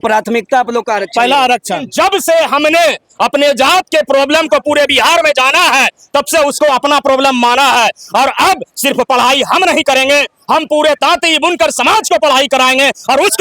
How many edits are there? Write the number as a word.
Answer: one